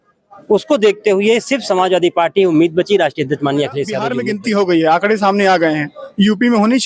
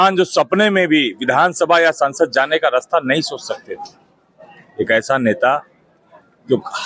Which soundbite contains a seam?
first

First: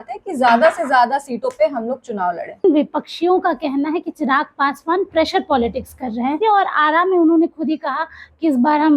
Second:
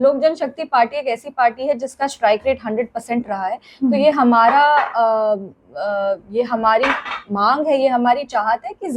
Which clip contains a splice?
first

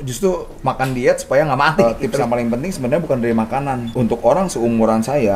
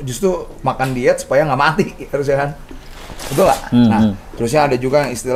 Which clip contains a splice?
first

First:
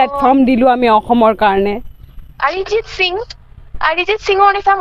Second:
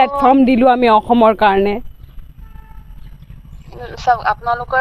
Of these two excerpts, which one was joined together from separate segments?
first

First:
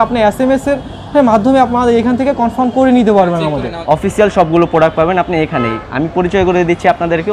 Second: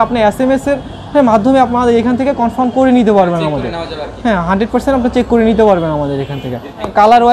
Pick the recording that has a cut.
first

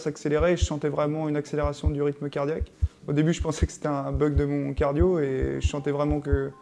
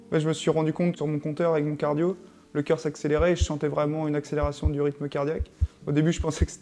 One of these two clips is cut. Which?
second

